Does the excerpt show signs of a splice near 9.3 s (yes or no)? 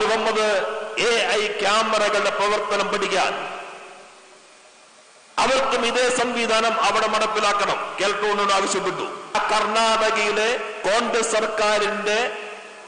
yes